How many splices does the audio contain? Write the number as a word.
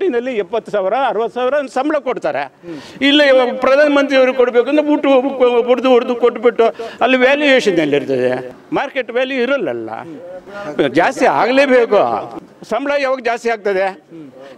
two